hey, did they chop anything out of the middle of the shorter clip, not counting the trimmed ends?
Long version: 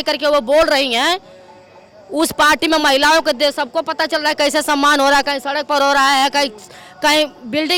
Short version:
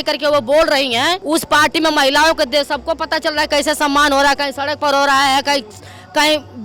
yes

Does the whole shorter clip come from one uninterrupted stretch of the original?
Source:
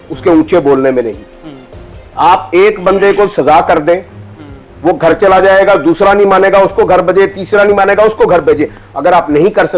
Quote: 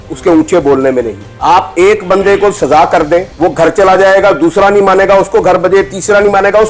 no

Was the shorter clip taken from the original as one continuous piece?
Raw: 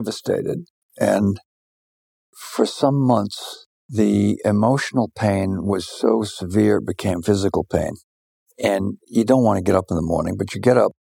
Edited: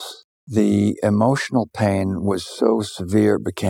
yes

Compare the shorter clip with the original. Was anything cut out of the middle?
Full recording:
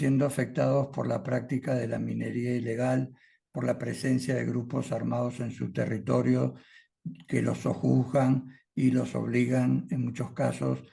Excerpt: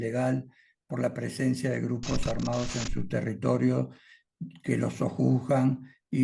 no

